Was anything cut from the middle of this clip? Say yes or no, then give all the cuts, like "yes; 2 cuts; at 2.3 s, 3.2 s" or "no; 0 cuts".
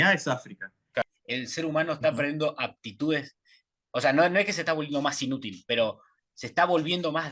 yes; 2 cuts; at 1.0 s, 3.7 s